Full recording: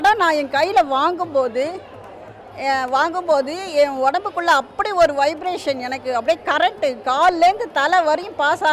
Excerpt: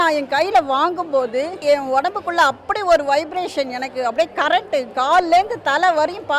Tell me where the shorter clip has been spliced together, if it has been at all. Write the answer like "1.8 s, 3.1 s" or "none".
1.6 s